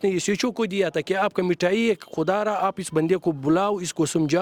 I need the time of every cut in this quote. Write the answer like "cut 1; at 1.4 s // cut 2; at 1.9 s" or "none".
none